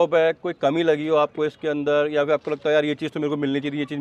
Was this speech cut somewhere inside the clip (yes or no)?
no